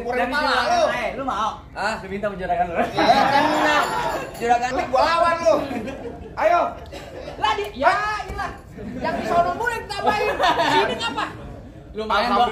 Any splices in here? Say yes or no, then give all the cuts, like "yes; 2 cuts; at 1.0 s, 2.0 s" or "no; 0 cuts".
yes; 1 cut; at 4.7 s